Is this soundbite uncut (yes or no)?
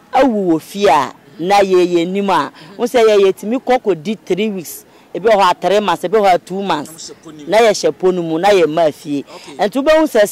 yes